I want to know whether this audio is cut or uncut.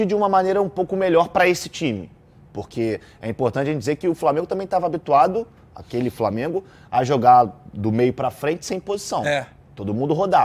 uncut